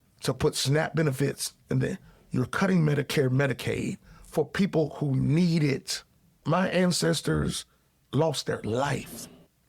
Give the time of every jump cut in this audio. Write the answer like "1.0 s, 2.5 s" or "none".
6.4 s

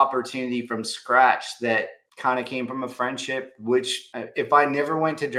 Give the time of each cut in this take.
none

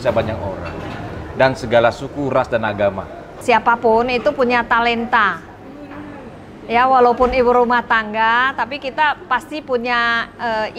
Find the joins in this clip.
3.4 s

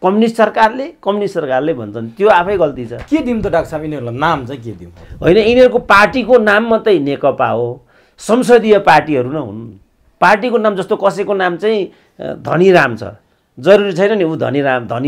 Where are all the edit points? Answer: none

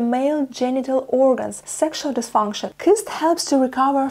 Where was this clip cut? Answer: 1.6 s, 2.6 s

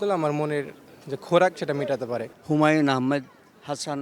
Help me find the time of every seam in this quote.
2.3 s

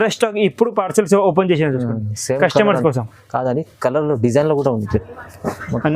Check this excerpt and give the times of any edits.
5.0 s

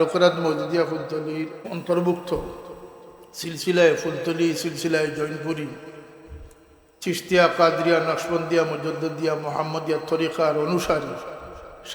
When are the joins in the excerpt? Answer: 1.7 s

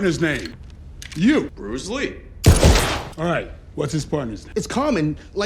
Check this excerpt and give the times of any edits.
4.5 s

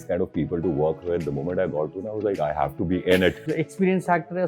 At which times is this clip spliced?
3.4 s

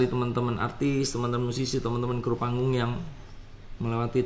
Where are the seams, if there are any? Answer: none

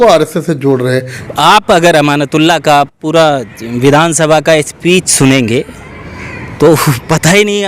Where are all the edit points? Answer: 1.1 s

